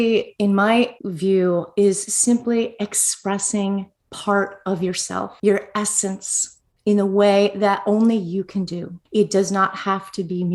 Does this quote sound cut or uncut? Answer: cut